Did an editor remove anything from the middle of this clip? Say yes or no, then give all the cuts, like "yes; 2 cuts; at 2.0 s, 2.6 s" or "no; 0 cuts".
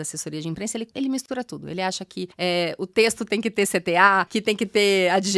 yes; 3 cuts; at 0.9 s, 2.3 s, 4.3 s